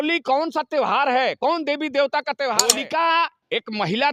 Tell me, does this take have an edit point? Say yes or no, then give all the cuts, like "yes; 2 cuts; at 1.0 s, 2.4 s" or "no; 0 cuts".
yes; 1 cut; at 2.7 s